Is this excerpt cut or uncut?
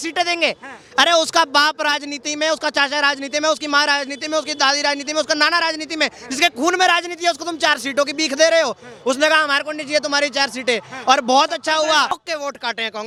uncut